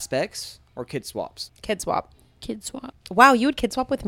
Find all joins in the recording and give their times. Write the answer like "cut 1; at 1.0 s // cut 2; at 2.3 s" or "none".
cut 1; at 1.5 s // cut 2; at 3.0 s

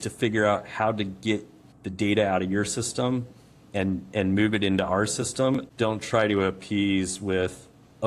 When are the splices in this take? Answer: cut 1; at 5.7 s

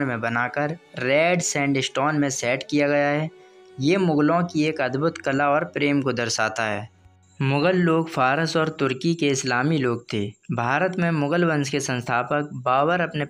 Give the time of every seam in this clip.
none

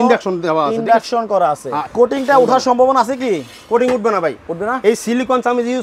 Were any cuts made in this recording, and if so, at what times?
cut 1; at 1.8 s

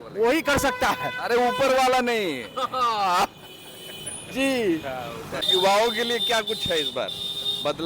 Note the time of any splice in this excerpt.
cut 1; at 5.4 s

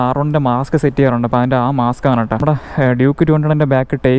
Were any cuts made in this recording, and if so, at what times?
cut 1; at 2.4 s

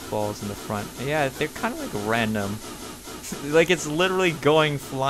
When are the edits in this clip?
none

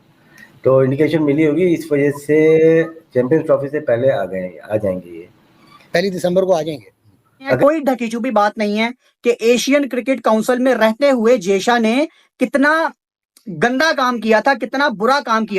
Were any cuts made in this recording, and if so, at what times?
cut 1; at 7.6 s

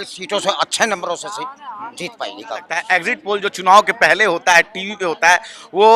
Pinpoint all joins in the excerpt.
cut 1; at 2.8 s

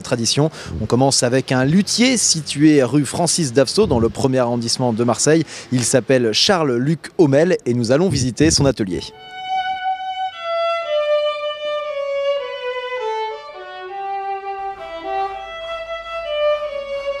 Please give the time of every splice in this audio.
cut 1; at 8.2 s

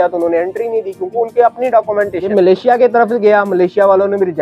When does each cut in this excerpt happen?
cut 1; at 2.3 s

